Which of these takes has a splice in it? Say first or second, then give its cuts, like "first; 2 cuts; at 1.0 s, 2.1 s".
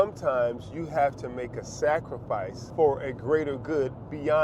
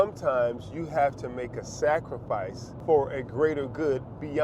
first; 1 cut; at 2.6 s